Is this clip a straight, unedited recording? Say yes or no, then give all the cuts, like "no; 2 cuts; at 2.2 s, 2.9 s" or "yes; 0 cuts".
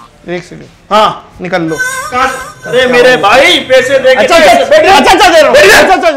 yes; 0 cuts